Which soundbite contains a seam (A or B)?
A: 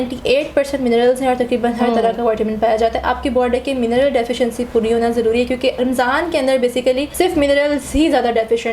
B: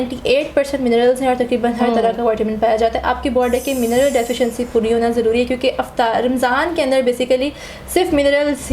A